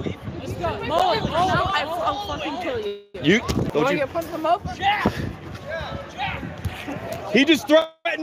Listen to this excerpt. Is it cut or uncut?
cut